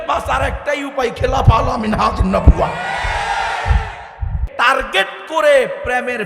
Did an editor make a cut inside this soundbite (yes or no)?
yes